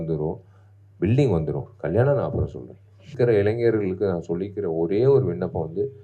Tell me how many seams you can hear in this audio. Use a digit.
1